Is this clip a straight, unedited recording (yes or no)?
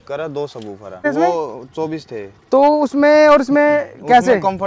no